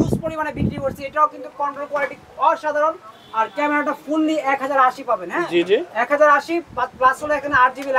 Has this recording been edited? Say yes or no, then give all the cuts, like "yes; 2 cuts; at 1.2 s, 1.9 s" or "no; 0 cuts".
no; 0 cuts